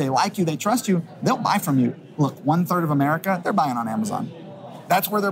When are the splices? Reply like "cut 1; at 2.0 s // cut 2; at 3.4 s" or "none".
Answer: cut 1; at 1.9 s